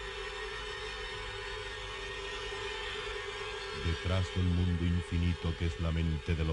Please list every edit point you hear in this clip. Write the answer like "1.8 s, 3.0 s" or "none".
4.1 s